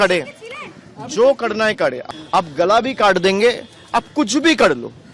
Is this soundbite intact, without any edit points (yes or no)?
no